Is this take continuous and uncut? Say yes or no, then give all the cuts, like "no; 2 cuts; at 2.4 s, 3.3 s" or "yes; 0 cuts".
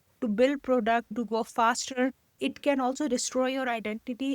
no; 2 cuts; at 1.1 s, 2.4 s